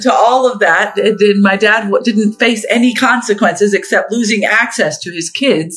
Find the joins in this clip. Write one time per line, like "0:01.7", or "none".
none